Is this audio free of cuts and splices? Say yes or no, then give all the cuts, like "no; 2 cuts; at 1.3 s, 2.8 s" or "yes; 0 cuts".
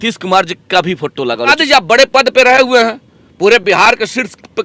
no; 1 cut; at 1.5 s